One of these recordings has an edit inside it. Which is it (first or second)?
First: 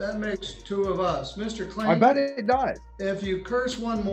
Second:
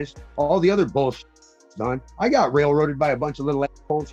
first